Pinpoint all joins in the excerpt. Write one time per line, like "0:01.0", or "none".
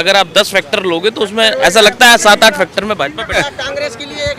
0:03.3